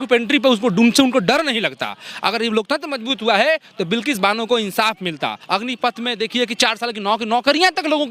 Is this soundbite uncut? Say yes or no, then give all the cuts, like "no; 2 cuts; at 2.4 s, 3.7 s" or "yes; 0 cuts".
no; 1 cut; at 5.4 s